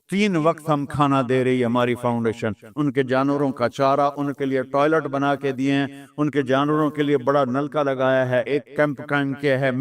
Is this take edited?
yes; 2 cuts; at 2.6 s, 8.5 s

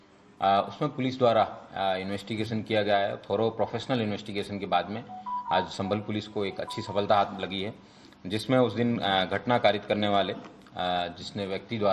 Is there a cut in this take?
no; 0 cuts

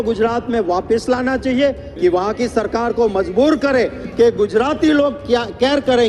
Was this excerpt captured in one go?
no; 1 cut; at 1.9 s

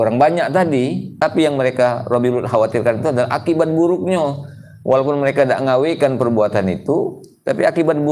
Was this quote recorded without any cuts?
no; 1 cut; at 1.1 s

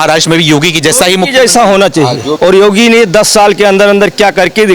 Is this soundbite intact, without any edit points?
no; 1 cut; at 2.3 s

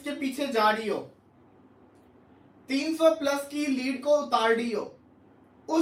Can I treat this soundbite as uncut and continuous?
yes; 0 cuts

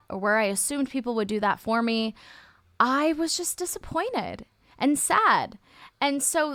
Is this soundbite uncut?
yes; 0 cuts

